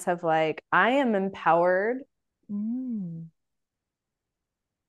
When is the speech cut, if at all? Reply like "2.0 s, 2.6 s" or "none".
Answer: none